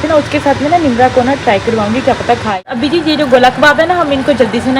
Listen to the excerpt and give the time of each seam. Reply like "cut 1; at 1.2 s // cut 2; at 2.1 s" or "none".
cut 1; at 2.7 s

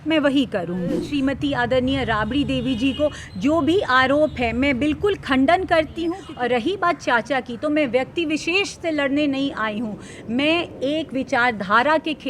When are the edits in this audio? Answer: cut 1; at 1.0 s // cut 2; at 6.2 s

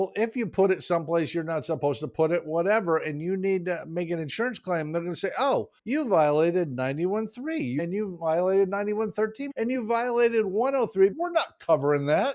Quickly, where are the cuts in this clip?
cut 1; at 5.8 s // cut 2; at 7.8 s // cut 3; at 9.4 s // cut 4; at 11.2 s

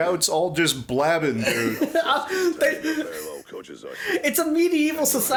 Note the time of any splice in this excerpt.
none

